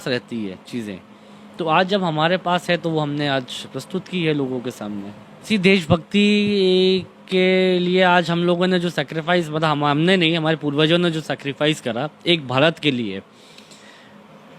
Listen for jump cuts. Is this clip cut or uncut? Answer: cut